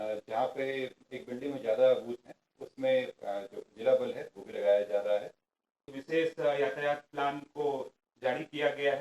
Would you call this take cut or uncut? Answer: cut